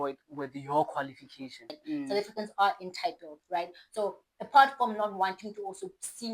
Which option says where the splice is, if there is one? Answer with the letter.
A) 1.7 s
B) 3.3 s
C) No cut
A